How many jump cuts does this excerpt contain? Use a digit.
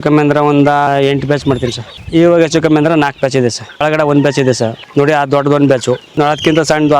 5